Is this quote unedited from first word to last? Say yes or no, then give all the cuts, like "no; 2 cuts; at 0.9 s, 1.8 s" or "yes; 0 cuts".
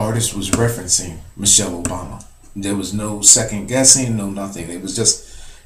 yes; 0 cuts